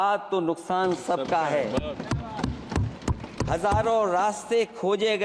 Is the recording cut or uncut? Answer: uncut